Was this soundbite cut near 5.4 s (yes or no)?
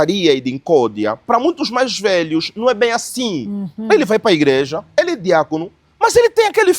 no